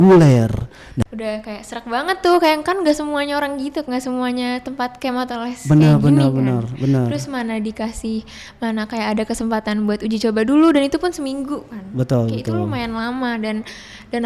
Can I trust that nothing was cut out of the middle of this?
no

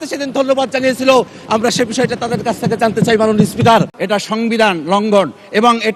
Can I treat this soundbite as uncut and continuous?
no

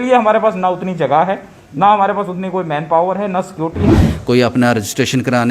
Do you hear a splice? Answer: yes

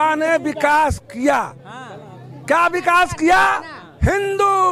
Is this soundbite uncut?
yes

